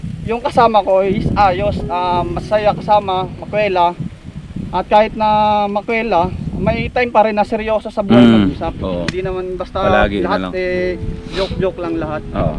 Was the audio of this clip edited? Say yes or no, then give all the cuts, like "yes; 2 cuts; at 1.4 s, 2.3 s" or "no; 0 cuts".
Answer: no; 0 cuts